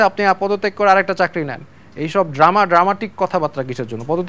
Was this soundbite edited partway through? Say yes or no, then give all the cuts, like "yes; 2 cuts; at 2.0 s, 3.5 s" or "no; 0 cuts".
no; 0 cuts